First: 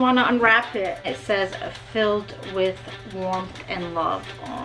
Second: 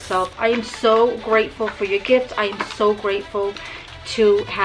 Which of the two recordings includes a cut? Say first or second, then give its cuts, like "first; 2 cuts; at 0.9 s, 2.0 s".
first; 1 cut; at 1.1 s